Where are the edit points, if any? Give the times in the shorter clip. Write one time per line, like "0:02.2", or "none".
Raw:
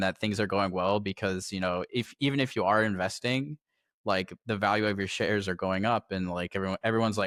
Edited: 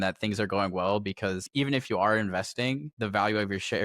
0:01.5
0:02.9

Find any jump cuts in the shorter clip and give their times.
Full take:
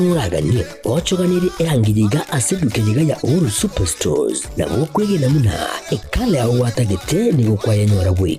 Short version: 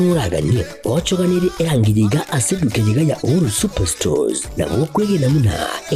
none

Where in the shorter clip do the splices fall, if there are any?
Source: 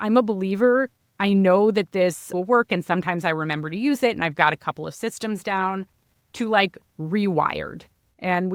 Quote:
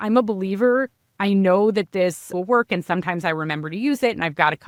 none

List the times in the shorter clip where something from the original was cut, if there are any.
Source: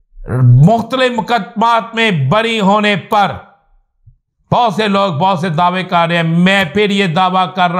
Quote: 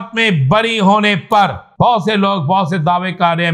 0:01.6

